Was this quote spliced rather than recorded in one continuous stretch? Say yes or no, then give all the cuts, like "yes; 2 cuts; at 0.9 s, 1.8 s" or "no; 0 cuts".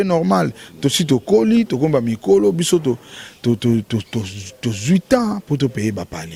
no; 0 cuts